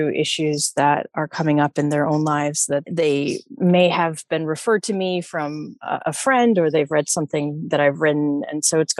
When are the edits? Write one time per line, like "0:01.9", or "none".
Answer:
none